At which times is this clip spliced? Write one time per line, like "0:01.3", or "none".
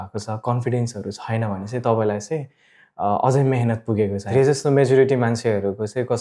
0:04.2